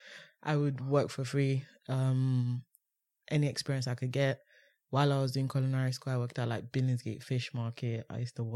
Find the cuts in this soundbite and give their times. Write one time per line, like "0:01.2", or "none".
none

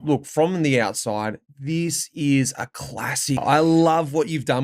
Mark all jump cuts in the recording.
0:03.4

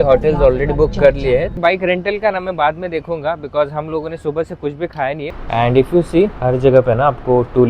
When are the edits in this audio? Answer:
0:01.6
0:05.3

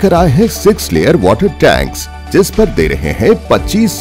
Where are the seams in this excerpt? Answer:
none

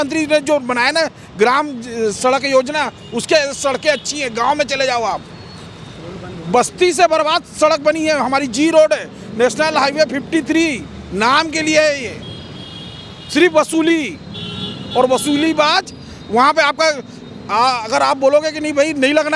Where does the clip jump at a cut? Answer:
none

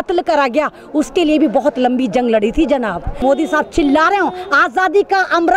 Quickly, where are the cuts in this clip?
0:03.2

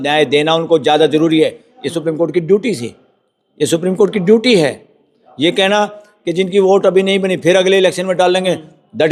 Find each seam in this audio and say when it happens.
none

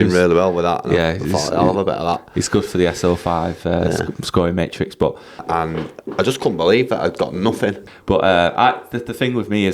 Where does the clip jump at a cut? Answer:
0:05.4
0:07.8

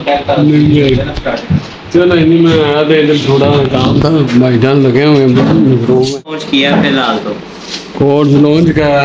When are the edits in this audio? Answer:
0:06.4

